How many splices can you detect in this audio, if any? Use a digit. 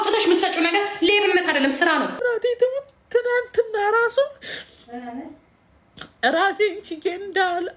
1